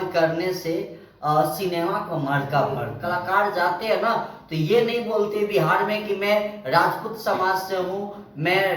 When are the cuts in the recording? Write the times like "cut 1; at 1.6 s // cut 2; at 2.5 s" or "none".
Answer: cut 1; at 2.9 s

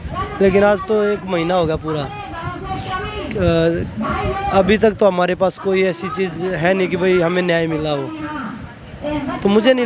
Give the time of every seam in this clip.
none

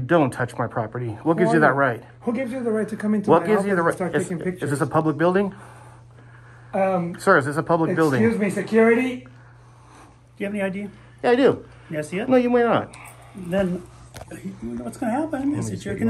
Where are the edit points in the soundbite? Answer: cut 1; at 10.1 s // cut 2; at 12.7 s

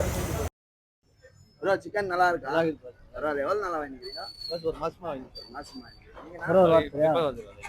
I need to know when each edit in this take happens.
none

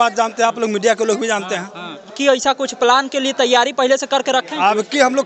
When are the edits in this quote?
cut 1; at 2.2 s

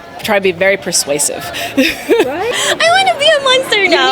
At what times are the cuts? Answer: cut 1; at 2.5 s

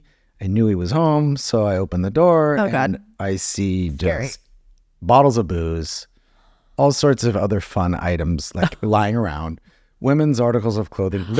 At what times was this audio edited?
none

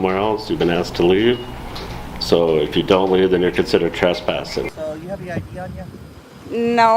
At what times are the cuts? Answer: cut 1; at 4.7 s

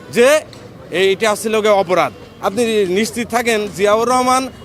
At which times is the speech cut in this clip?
cut 1; at 2.3 s

